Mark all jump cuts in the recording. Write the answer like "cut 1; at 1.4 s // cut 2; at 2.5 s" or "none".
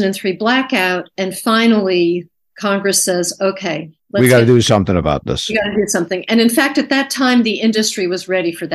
cut 1; at 3.9 s